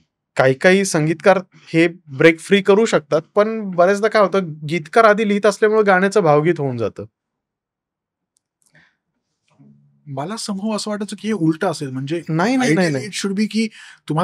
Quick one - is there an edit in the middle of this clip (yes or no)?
no